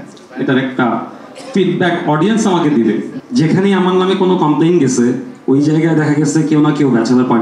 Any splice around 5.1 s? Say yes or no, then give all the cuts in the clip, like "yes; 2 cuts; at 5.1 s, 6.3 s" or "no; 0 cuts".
no; 1 cut; at 3.2 s